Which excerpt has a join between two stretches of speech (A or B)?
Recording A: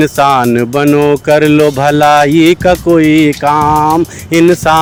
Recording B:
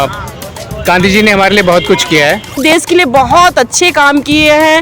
B